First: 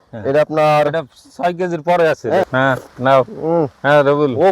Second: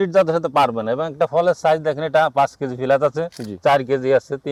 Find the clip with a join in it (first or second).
first